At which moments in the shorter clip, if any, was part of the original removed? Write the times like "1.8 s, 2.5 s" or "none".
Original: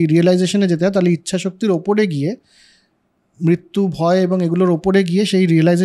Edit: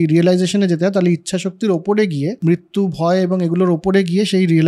2.4 s